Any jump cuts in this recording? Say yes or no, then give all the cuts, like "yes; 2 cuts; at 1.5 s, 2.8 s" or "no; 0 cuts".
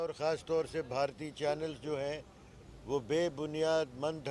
no; 0 cuts